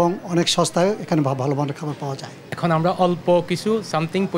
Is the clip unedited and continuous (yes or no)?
no